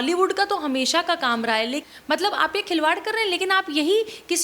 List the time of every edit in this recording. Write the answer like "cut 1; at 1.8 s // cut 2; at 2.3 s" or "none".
cut 1; at 1.8 s